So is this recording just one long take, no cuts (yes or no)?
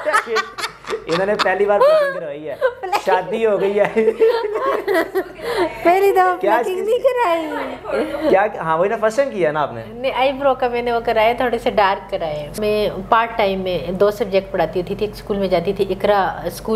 no